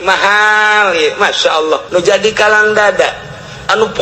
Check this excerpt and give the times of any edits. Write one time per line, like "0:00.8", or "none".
0:01.8